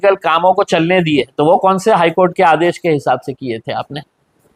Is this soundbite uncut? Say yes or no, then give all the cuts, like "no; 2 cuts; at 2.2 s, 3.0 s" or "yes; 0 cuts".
yes; 0 cuts